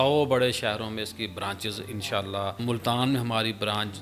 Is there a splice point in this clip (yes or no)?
yes